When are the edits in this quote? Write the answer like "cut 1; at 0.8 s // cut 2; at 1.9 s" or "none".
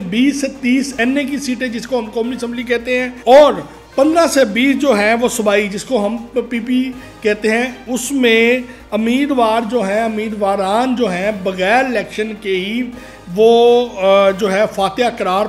none